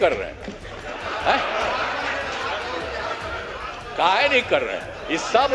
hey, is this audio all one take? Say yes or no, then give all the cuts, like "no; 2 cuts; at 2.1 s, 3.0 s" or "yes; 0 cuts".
yes; 0 cuts